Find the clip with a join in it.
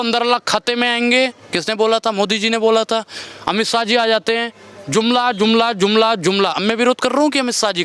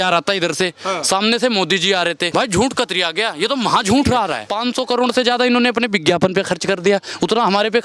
second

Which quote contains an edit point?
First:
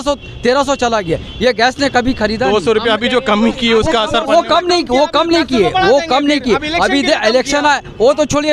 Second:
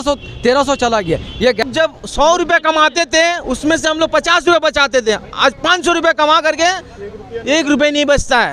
second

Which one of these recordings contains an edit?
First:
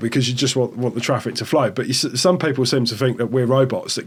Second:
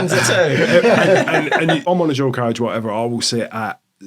second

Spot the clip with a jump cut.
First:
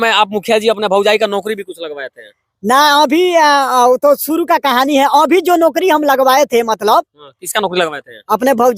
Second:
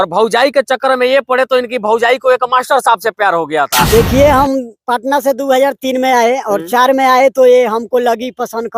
second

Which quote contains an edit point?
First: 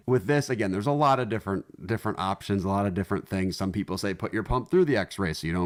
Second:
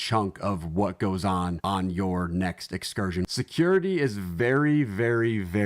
second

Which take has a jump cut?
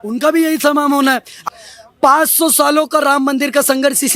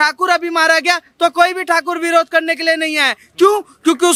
first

